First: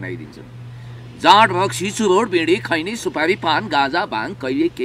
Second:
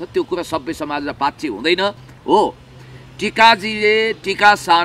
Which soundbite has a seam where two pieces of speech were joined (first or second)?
second